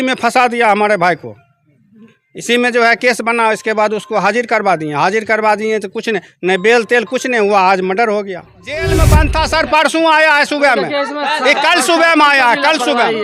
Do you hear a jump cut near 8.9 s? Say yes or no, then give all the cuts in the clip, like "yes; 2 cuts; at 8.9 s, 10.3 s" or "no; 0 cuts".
yes; 1 cut; at 8.9 s